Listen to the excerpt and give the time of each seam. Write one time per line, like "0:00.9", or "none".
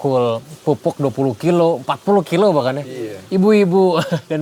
none